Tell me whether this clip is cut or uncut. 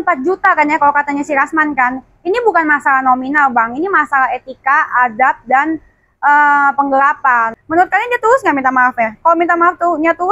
cut